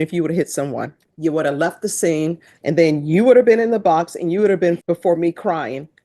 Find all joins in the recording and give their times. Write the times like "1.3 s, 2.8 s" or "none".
1.0 s, 2.5 s, 4.8 s